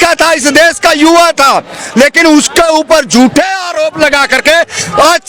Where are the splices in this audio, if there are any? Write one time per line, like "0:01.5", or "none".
none